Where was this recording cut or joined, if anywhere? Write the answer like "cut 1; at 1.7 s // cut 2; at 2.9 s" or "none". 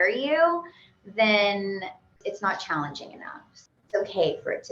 cut 1; at 2.2 s // cut 2; at 3.6 s

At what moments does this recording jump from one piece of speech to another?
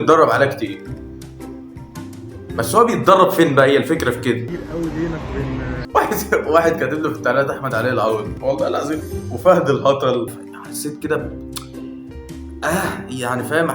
cut 1; at 4.5 s // cut 2; at 5.8 s // cut 3; at 8.3 s // cut 4; at 10.3 s

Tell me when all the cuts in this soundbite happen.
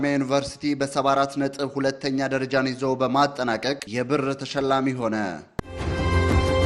cut 1; at 5.5 s

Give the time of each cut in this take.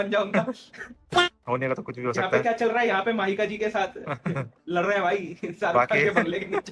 none

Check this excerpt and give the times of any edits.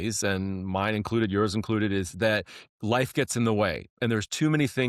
none

